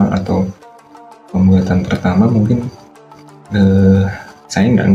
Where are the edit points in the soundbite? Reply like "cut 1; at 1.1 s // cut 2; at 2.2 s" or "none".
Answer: none

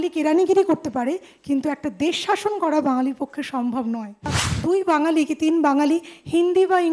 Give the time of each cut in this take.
cut 1; at 4.5 s

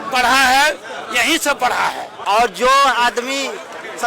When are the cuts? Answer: cut 1; at 2.1 s

